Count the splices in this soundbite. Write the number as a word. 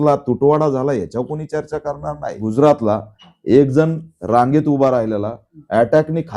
one